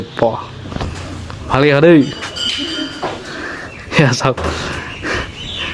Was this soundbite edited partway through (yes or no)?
no